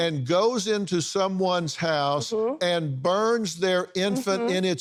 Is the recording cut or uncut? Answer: uncut